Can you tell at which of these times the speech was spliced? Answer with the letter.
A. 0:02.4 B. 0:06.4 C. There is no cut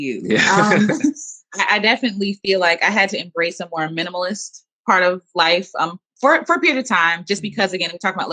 C